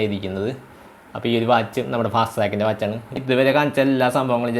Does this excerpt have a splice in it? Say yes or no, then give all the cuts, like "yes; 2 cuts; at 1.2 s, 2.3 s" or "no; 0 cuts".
yes; 1 cut; at 3.1 s